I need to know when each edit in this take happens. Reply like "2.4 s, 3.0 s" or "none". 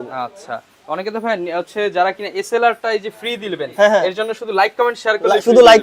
none